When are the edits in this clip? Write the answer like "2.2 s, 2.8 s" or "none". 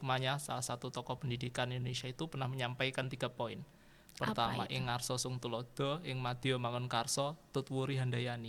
none